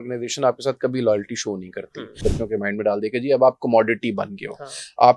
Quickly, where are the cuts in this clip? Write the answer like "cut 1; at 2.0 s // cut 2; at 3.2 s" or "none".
cut 1; at 2.2 s